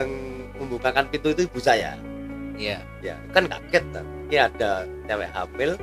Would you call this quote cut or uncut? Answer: uncut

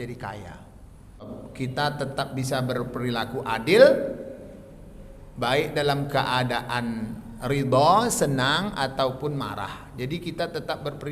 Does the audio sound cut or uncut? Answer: cut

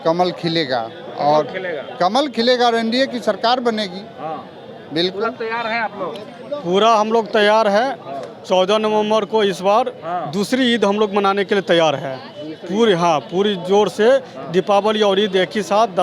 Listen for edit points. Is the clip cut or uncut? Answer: uncut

